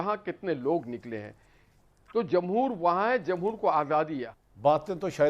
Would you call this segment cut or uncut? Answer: cut